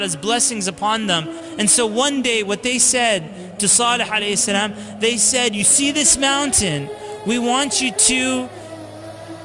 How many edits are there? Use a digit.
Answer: 1